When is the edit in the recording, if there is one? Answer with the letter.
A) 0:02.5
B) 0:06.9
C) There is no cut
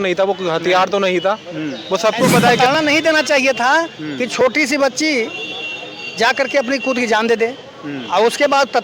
A